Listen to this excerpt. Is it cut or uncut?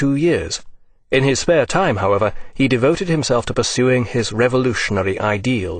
cut